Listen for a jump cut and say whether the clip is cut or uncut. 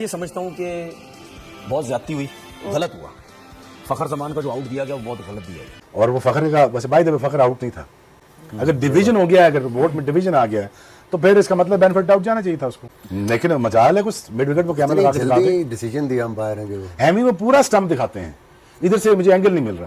cut